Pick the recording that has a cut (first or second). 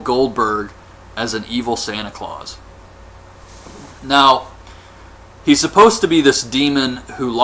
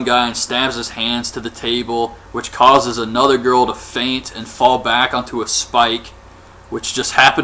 first